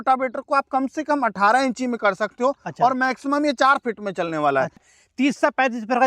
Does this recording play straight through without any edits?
no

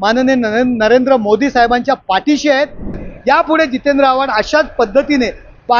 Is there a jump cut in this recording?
yes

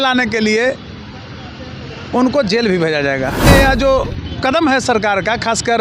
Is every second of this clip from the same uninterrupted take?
no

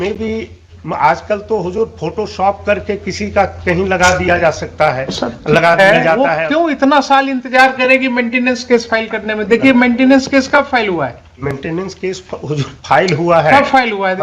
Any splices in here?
yes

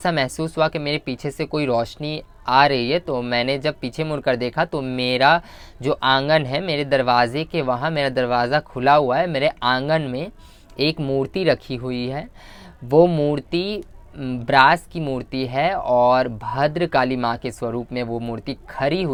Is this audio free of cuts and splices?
yes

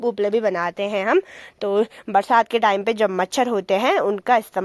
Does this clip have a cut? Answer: no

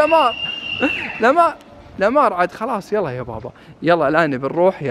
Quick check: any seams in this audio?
no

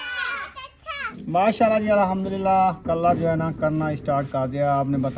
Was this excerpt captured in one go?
no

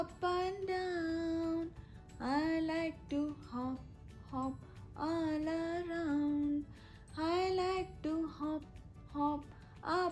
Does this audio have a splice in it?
no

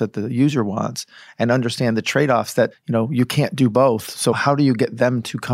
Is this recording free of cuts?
no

